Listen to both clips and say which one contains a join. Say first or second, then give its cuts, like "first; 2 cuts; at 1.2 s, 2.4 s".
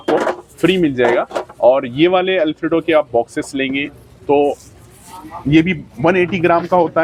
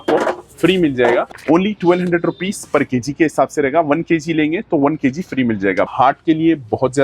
second; 2 cuts; at 1.3 s, 5.9 s